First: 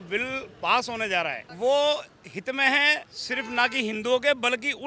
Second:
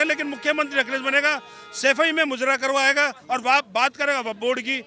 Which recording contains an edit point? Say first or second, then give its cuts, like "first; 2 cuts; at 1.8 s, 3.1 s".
first; 2 cuts; at 1.4 s, 3.1 s